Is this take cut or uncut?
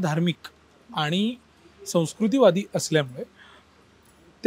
uncut